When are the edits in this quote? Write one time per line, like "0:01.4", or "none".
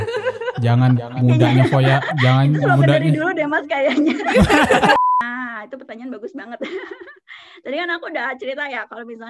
0:05.0